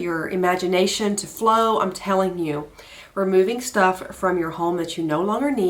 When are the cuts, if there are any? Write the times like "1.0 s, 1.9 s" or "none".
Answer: none